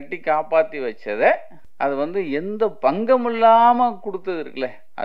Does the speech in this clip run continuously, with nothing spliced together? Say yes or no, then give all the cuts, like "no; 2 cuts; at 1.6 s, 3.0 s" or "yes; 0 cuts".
no; 1 cut; at 1.6 s